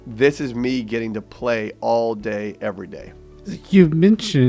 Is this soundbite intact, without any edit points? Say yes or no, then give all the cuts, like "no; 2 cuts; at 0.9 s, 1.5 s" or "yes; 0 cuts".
yes; 0 cuts